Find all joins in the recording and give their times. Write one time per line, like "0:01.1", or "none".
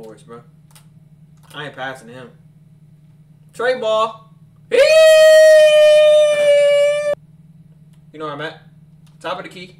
0:07.1

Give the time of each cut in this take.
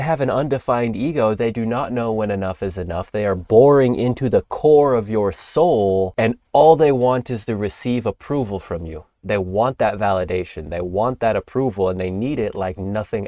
0:06.1

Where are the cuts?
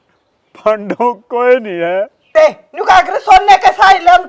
0:02.3

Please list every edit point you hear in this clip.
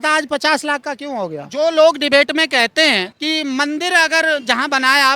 0:01.4
0:03.1

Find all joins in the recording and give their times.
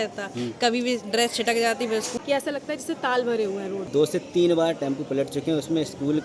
0:02.1
0:03.9

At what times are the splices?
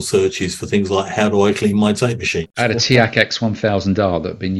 0:02.4

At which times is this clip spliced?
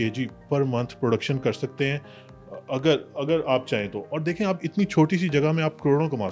none

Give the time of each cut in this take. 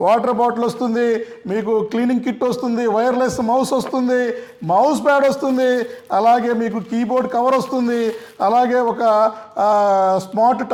none

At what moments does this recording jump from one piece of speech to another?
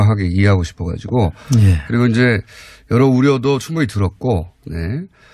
none

